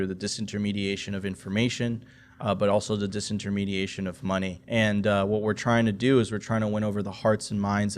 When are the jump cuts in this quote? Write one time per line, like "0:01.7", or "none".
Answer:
0:04.6